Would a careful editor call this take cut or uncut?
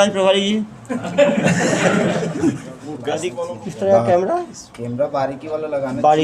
cut